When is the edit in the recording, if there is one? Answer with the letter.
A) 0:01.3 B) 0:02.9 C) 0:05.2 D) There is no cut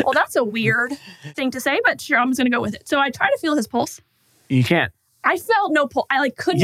A